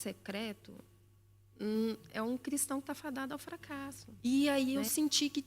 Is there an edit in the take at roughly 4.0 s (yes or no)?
yes